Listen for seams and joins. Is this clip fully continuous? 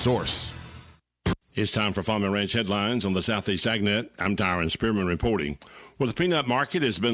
no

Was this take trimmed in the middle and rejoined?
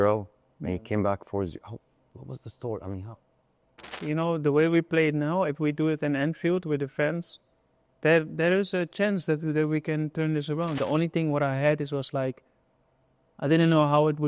yes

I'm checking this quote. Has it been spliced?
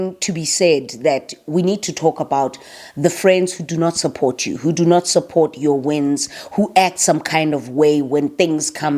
no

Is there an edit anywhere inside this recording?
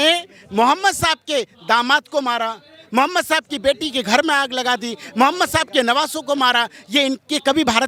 no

